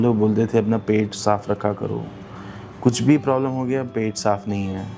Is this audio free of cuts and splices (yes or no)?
yes